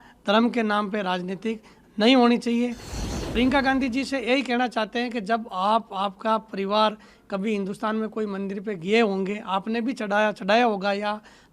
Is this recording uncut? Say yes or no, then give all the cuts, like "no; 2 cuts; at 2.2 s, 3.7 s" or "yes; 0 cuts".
no; 1 cut; at 2.9 s